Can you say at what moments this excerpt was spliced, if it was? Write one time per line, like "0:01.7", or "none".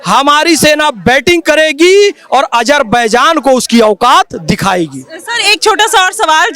none